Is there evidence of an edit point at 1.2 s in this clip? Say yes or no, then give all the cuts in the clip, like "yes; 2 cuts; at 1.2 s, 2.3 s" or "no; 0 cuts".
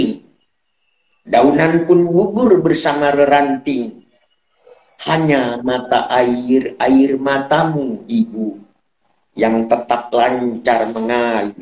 no; 0 cuts